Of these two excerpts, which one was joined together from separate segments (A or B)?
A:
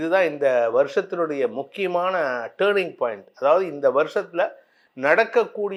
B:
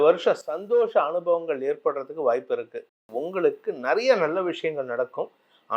B